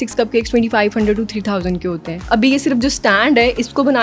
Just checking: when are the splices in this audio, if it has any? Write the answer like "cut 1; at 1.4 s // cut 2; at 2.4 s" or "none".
cut 1; at 2.3 s